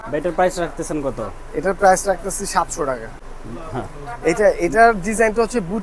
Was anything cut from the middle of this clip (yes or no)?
yes